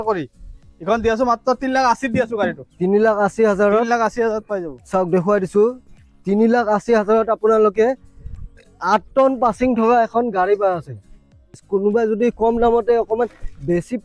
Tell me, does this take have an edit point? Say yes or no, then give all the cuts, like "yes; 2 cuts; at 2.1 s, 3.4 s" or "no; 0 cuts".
yes; 1 cut; at 11.6 s